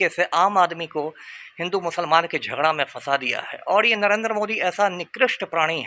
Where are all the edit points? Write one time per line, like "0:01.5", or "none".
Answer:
none